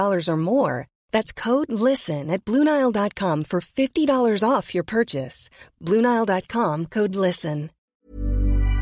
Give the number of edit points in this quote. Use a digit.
1